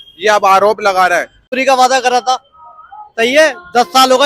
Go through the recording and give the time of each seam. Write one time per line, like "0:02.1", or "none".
0:01.5